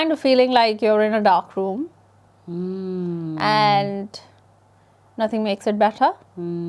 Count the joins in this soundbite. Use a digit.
0